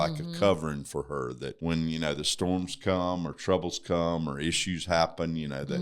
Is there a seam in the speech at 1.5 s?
yes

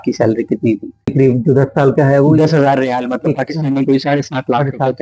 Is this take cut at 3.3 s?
no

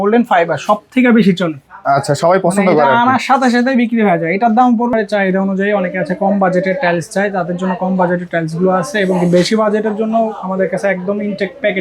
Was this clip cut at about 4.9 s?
yes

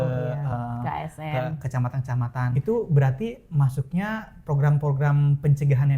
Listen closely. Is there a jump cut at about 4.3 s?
no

